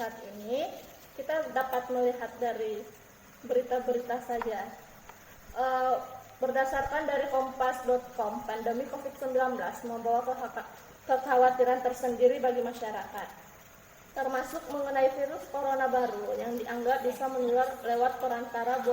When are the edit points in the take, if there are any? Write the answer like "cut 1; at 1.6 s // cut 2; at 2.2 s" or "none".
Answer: cut 1; at 3.7 s